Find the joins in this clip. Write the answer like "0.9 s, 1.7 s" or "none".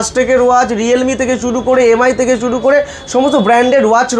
none